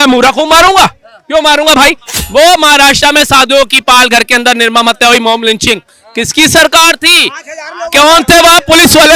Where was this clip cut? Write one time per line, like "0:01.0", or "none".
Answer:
0:02.2